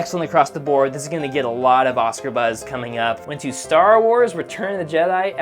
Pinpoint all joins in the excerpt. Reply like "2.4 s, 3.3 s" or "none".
3.3 s